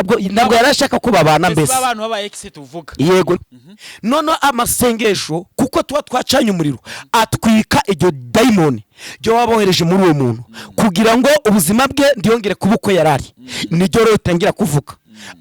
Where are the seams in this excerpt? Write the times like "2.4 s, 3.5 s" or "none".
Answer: 3.4 s

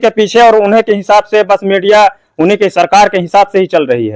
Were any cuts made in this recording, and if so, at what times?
none

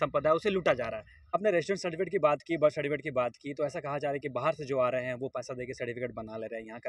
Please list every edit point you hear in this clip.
1.3 s

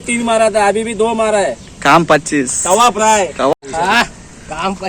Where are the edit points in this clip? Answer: 3.6 s

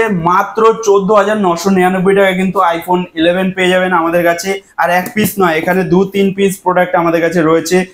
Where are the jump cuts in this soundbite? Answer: none

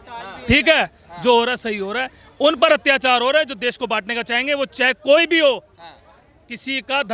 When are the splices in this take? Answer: none

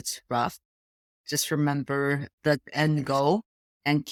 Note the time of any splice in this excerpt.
none

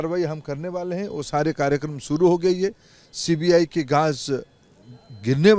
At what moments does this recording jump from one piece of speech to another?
none

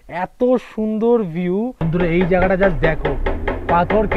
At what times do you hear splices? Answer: 1.8 s

